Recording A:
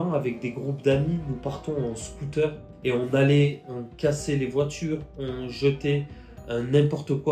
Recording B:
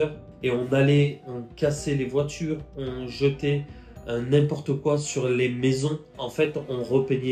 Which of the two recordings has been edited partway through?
B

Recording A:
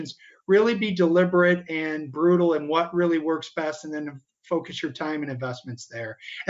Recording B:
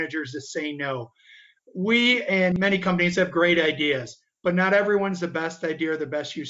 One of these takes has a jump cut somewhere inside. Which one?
B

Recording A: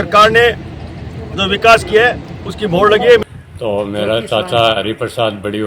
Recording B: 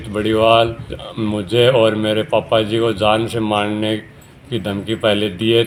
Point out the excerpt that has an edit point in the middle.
A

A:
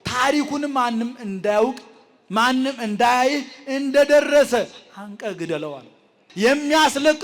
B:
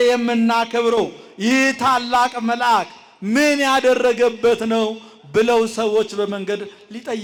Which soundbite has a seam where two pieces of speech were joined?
A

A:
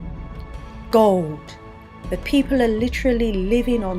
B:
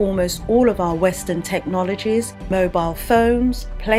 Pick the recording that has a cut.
A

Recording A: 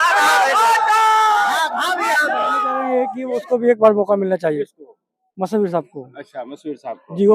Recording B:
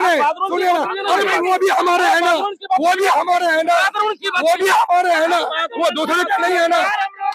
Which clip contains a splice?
A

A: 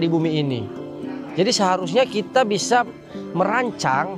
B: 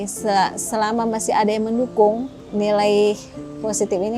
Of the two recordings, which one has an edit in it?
B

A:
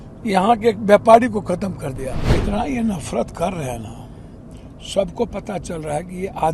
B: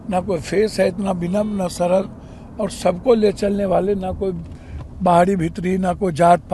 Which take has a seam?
A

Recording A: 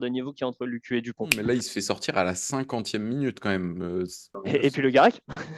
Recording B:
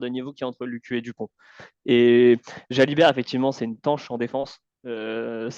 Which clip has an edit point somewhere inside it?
A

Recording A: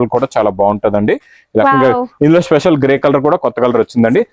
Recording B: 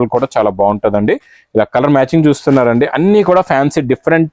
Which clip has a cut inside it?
A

